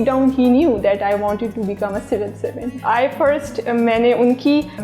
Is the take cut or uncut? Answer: cut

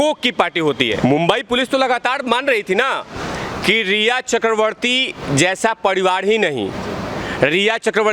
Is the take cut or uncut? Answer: cut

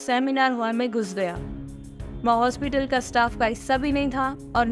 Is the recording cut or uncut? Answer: uncut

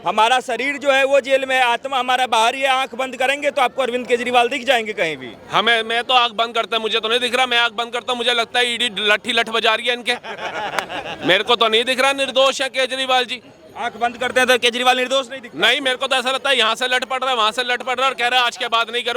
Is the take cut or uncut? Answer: uncut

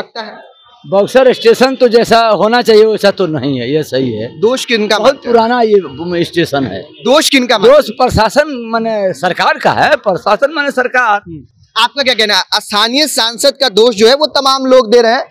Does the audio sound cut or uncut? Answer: uncut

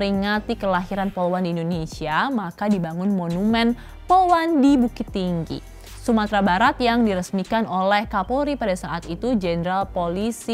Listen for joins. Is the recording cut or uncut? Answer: uncut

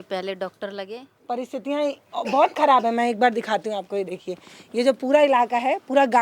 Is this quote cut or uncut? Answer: cut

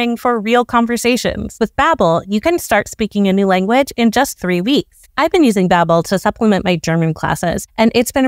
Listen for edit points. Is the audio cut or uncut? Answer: cut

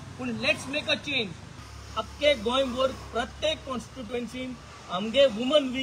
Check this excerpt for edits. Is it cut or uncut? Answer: cut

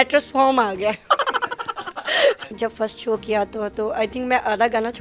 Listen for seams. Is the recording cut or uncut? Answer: cut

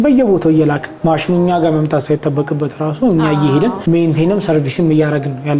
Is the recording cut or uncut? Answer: uncut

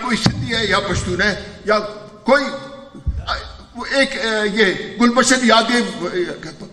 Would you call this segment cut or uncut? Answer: uncut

